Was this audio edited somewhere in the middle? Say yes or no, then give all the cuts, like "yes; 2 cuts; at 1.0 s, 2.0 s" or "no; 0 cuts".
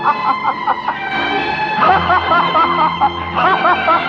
no; 0 cuts